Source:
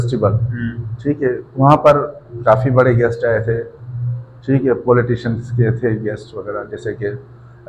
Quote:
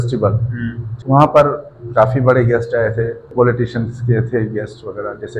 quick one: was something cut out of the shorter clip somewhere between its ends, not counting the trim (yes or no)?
yes